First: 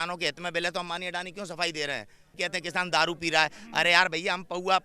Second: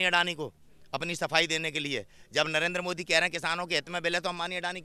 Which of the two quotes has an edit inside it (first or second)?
first